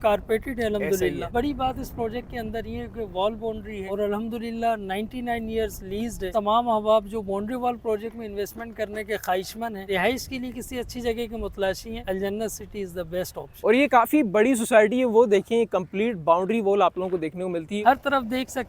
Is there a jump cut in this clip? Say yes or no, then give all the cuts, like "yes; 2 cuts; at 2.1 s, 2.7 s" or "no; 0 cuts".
yes; 7 cuts; at 1.3 s, 3.8 s, 6.3 s, 9.9 s, 12.0 s, 13.6 s, 17.7 s